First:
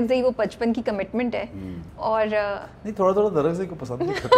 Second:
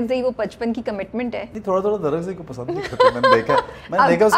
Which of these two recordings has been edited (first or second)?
second